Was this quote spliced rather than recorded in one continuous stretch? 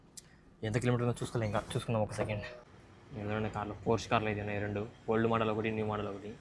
yes; 1 cut; at 2.5 s

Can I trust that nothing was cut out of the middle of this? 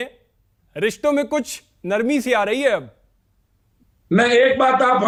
yes; 0 cuts

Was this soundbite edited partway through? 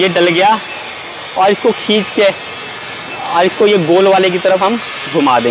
no; 0 cuts

